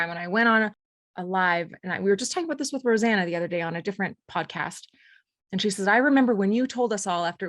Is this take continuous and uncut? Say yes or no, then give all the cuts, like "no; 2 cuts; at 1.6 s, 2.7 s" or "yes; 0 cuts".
no; 1 cut; at 1.1 s